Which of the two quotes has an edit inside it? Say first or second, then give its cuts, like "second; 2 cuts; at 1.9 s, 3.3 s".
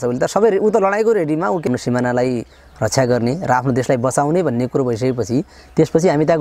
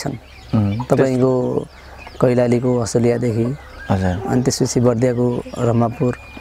first; 1 cut; at 1.7 s